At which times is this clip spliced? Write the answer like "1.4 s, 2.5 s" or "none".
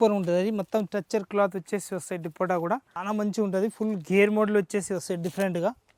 2.9 s